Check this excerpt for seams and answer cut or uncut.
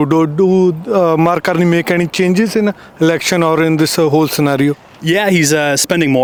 uncut